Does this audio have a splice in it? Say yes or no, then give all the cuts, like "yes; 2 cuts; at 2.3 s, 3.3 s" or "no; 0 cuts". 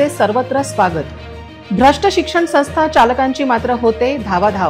no; 0 cuts